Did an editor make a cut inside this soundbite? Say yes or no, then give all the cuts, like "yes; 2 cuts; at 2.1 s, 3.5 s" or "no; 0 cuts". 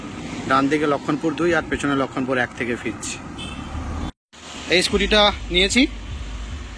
yes; 1 cut; at 4.1 s